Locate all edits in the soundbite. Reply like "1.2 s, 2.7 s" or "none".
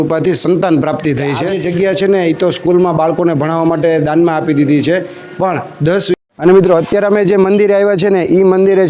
1.5 s, 6.1 s